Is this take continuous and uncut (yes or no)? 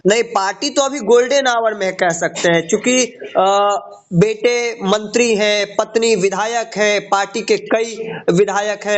yes